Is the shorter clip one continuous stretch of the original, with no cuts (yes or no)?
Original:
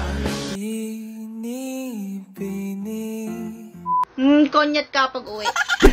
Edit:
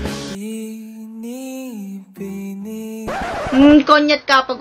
no